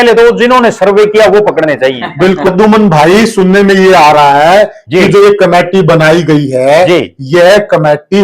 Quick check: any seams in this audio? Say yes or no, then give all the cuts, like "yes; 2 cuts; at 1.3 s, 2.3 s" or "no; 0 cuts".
yes; 1 cut; at 2.5 s